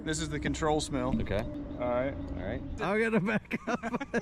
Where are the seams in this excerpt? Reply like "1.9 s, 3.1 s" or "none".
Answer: 1.5 s, 2.8 s

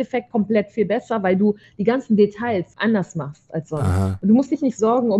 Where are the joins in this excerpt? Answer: 2.7 s, 4.1 s

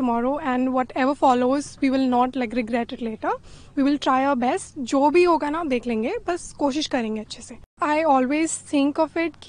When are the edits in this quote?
7.8 s

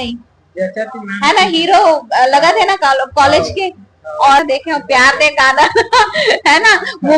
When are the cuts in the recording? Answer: 4.4 s

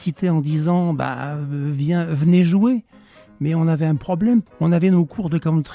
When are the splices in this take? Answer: 4.5 s

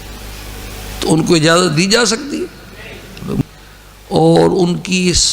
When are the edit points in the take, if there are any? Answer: 3.4 s

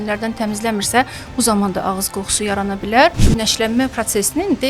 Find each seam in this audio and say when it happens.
3.2 s

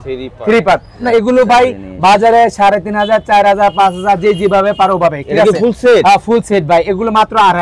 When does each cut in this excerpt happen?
1.0 s

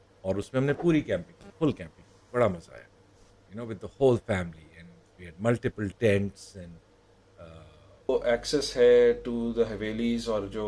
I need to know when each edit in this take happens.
8.1 s

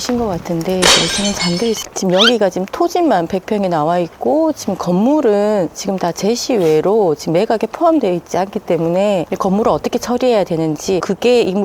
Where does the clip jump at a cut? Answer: 1.8 s

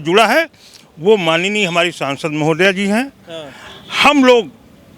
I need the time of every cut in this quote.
none

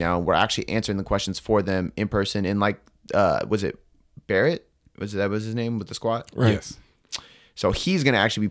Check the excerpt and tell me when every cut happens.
none

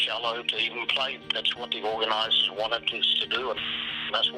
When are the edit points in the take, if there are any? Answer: 1.2 s

